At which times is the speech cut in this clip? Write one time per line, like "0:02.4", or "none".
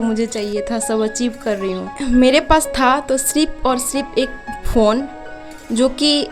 0:02.1